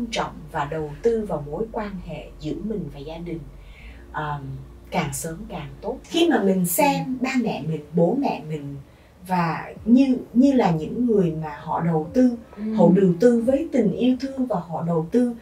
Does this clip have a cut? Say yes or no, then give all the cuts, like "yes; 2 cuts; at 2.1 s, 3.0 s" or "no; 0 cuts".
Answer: yes; 1 cut; at 6.0 s